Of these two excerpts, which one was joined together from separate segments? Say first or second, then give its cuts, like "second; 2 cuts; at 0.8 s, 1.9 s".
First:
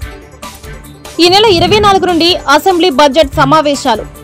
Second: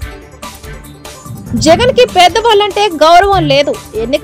first; 1 cut; at 1.2 s